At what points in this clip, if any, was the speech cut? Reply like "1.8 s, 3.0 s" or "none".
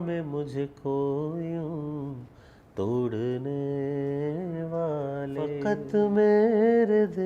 5.6 s